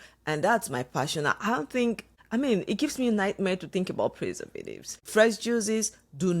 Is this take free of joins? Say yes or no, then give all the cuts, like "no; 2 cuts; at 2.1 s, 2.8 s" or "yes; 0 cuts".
no; 2 cuts; at 2.1 s, 5.0 s